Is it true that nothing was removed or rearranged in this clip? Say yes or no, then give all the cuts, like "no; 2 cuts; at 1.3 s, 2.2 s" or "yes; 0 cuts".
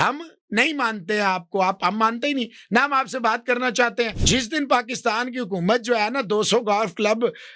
no; 1 cut; at 4.2 s